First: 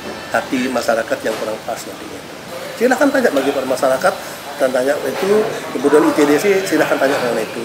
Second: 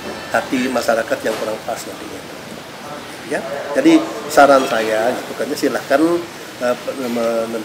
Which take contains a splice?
first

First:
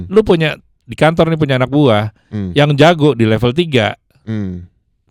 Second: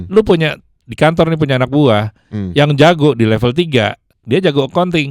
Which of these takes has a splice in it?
second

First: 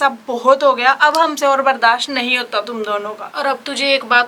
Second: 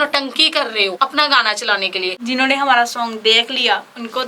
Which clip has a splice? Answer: second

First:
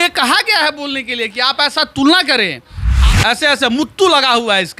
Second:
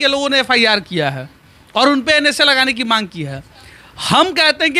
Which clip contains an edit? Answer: first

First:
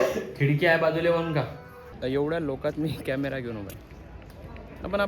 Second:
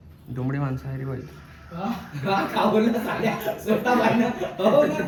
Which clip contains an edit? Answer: first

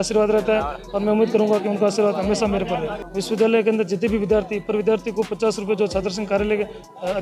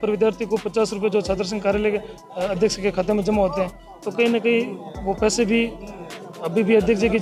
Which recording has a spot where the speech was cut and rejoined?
first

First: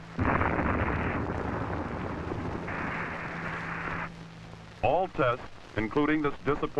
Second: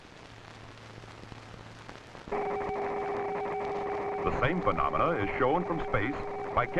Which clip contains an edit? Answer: first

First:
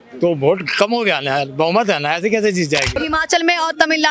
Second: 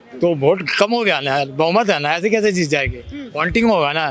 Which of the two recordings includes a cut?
first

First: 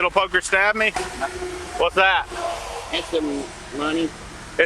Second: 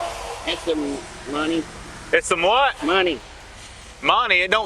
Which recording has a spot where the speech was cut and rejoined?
first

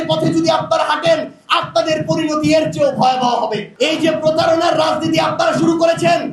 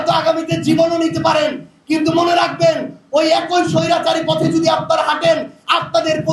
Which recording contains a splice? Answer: first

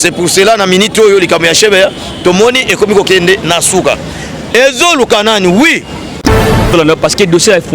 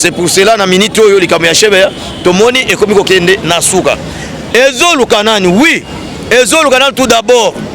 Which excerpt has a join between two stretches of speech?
first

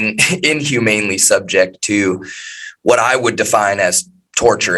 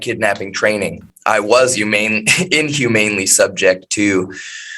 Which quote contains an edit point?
second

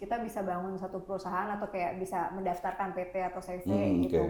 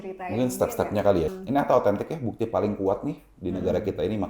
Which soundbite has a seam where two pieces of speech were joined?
second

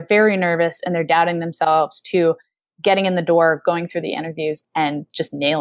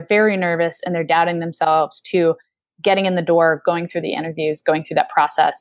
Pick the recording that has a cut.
first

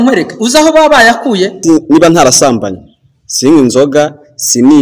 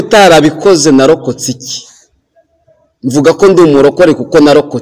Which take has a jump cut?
first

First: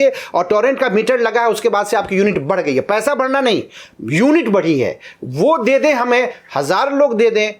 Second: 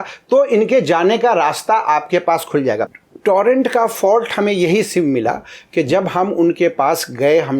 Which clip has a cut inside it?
second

